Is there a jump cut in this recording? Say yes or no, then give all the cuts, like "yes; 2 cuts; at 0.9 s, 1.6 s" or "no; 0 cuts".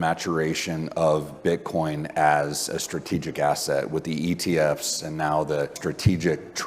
yes; 1 cut; at 5.8 s